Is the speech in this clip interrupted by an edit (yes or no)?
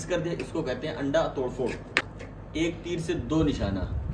yes